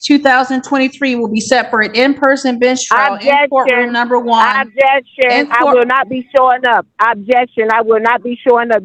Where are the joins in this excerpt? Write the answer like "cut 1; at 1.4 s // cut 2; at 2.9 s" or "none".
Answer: none

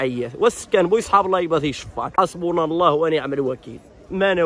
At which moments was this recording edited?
cut 1; at 2.1 s

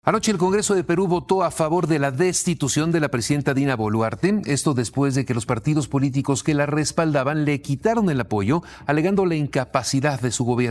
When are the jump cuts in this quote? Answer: none

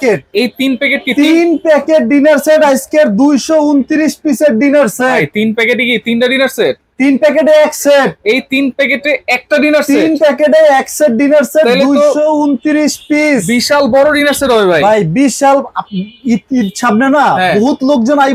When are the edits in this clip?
none

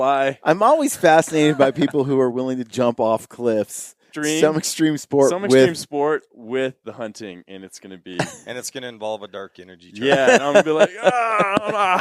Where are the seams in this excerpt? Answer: cut 1; at 4.1 s

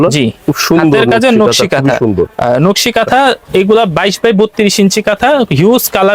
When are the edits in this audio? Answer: none

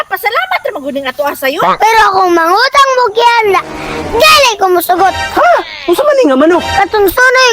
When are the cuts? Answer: cut 1; at 1.7 s // cut 2; at 5.2 s // cut 3; at 6.7 s

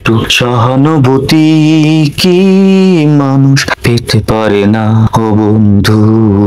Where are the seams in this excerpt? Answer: none

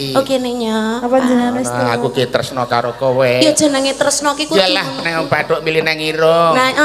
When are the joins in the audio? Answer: none

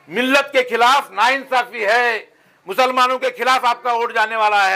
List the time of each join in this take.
none

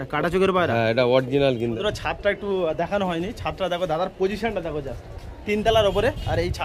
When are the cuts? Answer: cut 1; at 1.8 s

